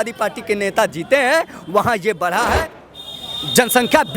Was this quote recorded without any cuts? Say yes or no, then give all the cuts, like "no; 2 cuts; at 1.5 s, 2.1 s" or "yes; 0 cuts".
no; 1 cut; at 2.7 s